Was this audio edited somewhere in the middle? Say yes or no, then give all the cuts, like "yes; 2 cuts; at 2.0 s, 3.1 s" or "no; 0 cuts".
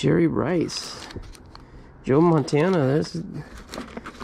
no; 0 cuts